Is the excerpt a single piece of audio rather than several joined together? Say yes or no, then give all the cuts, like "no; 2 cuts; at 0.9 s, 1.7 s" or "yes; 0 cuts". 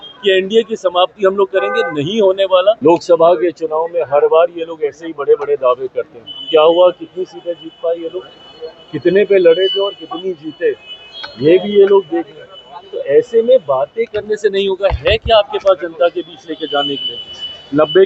no; 1 cut; at 2.8 s